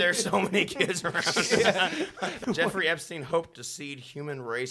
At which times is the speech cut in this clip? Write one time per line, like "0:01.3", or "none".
0:02.4